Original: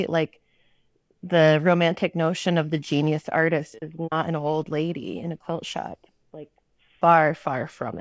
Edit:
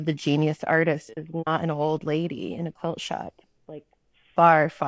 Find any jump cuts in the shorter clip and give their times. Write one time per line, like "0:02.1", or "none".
none